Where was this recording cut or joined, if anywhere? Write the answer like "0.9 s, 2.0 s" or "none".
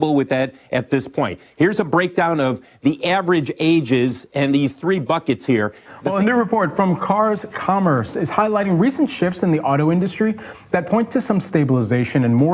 none